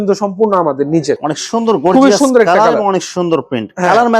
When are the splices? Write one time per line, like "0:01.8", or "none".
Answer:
0:01.2